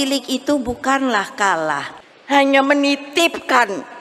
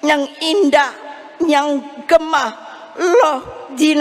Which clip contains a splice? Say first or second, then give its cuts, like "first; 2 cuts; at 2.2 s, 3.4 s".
first; 1 cut; at 1.9 s